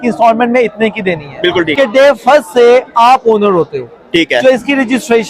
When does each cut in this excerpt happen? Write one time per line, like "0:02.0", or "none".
0:01.7